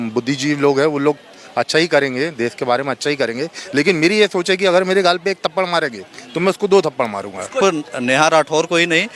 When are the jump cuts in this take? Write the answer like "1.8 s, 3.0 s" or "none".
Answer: 7.6 s

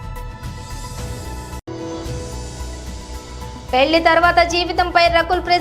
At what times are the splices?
3.0 s

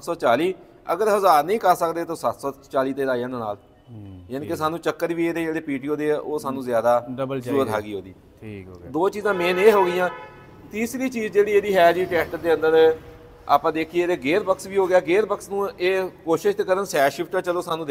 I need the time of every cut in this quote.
none

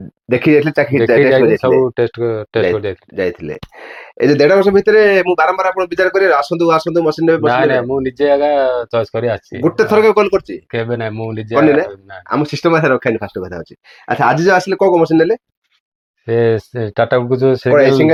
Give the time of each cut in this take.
none

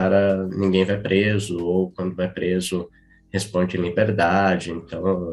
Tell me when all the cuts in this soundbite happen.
none

